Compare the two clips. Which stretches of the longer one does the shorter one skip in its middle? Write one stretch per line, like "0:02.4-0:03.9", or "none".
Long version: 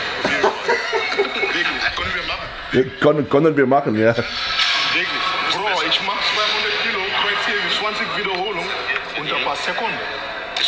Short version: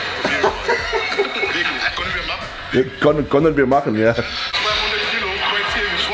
0:04.5-0:06.3